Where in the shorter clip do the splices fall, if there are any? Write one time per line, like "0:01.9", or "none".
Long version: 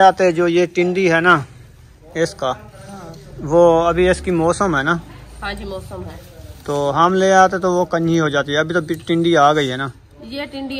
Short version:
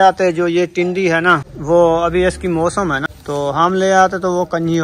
0:01.5
0:03.1